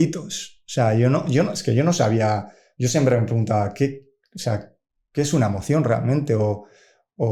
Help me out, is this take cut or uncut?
uncut